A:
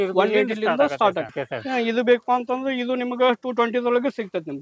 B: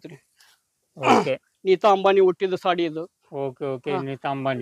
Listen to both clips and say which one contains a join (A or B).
A